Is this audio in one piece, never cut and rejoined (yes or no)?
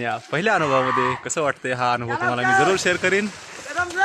yes